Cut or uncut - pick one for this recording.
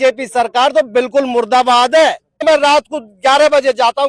cut